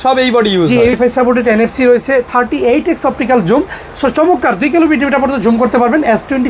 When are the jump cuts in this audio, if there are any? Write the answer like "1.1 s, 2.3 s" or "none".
0.9 s